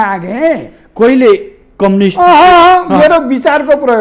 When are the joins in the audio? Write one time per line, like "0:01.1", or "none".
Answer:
none